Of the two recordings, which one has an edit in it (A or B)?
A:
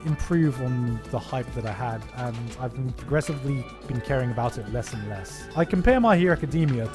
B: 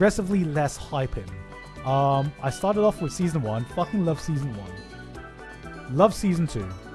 A